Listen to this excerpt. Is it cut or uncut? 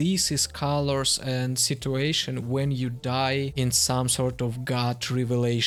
uncut